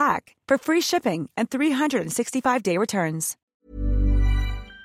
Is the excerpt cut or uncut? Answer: cut